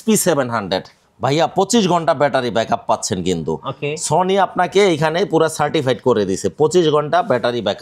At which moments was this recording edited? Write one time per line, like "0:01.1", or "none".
none